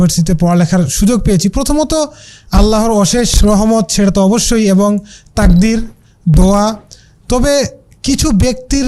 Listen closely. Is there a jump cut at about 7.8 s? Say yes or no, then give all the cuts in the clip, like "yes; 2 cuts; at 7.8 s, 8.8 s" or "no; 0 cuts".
no; 0 cuts